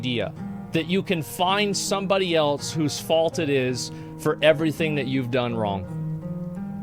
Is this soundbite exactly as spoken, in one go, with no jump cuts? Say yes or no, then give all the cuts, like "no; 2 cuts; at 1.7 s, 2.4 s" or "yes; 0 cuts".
yes; 0 cuts